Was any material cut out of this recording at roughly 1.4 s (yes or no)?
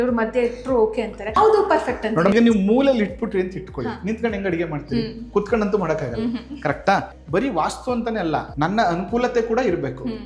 yes